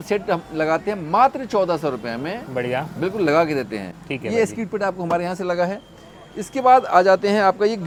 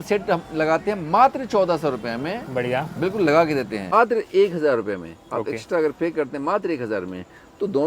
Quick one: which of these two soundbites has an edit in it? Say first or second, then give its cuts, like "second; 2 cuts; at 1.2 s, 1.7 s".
second; 1 cut; at 3.9 s